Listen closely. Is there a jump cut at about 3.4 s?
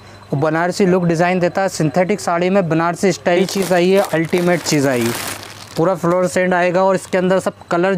yes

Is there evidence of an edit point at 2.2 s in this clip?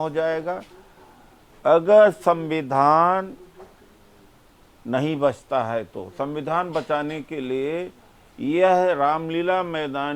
no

